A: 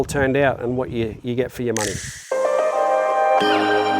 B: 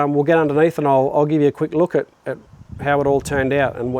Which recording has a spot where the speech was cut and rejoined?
A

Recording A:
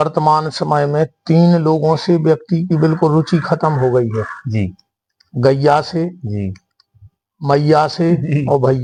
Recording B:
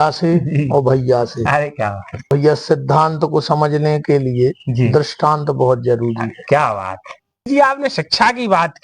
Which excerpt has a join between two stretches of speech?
B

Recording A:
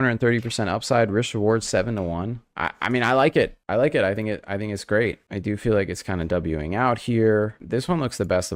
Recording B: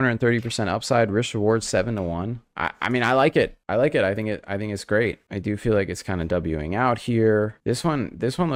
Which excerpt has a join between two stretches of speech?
A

